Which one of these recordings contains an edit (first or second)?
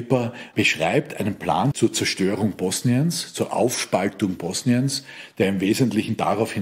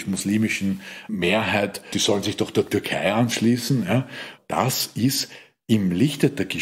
second